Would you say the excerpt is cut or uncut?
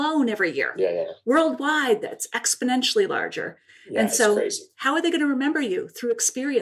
uncut